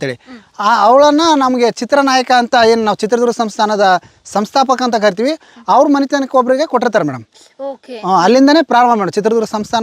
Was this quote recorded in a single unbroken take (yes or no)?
yes